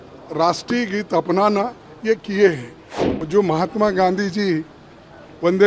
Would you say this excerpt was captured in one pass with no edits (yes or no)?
no